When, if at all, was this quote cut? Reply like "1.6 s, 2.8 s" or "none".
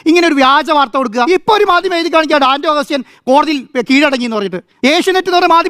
1.3 s